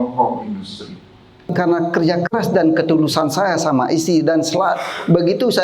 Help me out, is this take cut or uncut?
cut